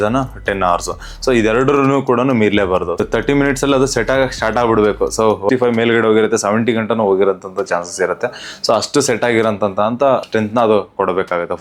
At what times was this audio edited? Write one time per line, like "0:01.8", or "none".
0:05.5

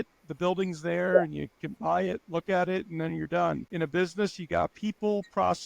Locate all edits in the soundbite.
0:03.7

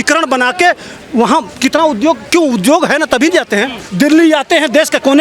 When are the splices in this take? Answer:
0:03.8

